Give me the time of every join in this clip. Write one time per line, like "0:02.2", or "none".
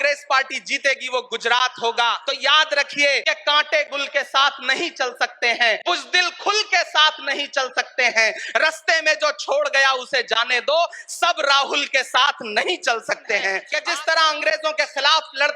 0:02.2
0:03.2
0:05.8
0:13.7